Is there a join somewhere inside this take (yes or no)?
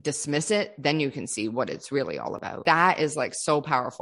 yes